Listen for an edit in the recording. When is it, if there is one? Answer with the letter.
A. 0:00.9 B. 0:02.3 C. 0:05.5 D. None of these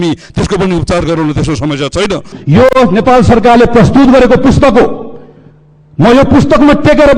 B